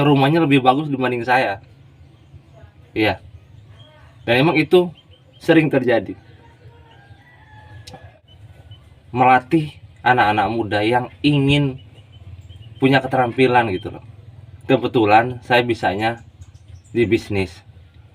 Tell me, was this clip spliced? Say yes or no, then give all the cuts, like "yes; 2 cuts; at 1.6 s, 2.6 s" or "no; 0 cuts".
yes; 1 cut; at 8.2 s